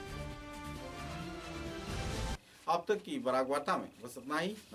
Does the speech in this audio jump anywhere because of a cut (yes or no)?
no